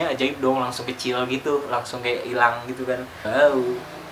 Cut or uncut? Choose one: cut